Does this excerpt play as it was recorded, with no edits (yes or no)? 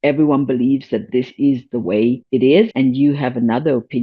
no